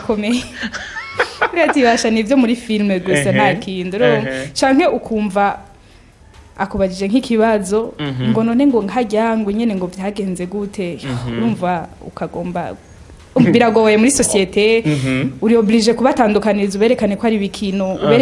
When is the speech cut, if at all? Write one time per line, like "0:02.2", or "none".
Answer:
none